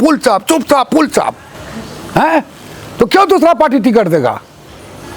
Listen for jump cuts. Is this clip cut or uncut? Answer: uncut